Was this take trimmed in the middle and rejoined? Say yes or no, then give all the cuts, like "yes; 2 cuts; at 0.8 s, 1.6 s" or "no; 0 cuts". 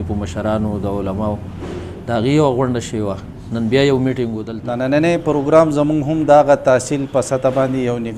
yes; 1 cut; at 4.5 s